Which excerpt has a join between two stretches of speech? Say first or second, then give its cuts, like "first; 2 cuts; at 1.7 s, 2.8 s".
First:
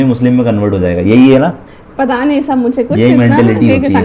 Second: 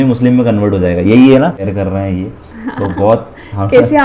second; 1 cut; at 1.7 s